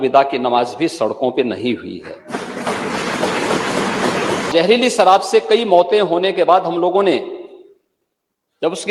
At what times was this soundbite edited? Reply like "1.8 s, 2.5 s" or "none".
4.5 s